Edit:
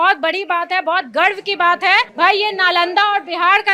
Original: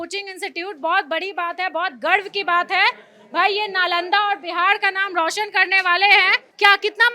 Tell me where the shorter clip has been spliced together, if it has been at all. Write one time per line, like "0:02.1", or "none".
0:02.1